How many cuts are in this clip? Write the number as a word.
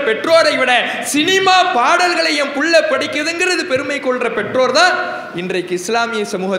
zero